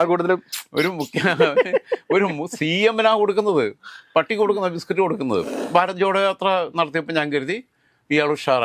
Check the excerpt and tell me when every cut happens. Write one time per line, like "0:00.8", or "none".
0:05.6

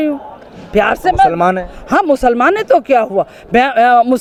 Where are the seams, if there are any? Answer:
none

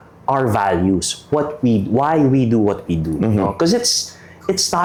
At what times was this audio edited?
none

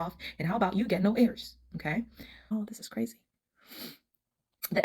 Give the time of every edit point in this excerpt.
0:02.4

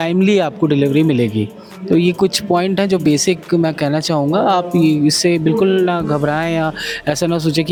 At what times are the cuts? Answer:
none

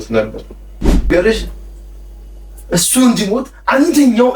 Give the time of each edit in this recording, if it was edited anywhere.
0:01.1

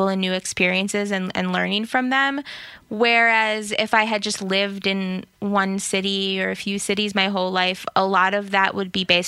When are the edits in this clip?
none

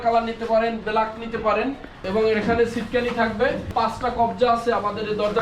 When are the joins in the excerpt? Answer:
0:02.0
0:03.7

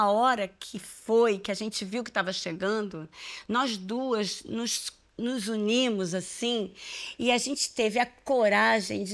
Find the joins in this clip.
none

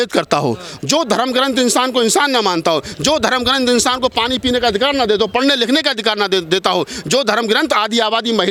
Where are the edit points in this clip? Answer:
none

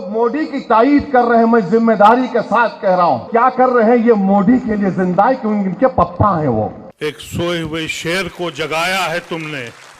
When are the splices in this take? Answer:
0:03.3
0:06.8

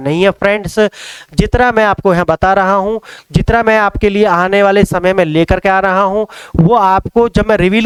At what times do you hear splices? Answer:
none

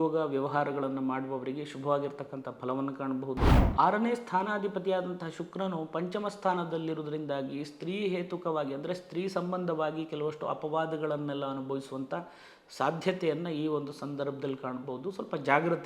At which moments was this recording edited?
0:03.6

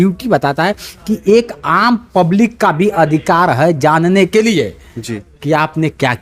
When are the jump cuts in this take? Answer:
none

